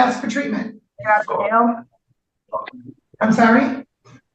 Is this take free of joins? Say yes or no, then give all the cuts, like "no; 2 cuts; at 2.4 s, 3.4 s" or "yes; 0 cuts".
no; 1 cut; at 0.9 s